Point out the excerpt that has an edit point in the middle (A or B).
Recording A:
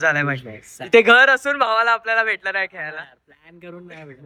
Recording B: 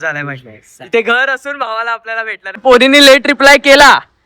B